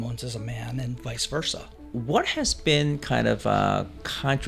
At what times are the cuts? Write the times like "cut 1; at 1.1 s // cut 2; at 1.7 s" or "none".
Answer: cut 1; at 1.8 s

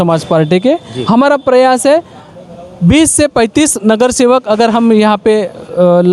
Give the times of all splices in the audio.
none

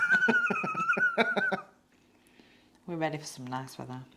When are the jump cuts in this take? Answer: cut 1; at 1.8 s

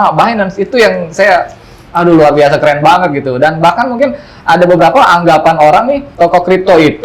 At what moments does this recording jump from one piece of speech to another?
cut 1; at 6.0 s

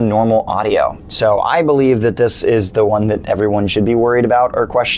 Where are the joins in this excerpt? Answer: none

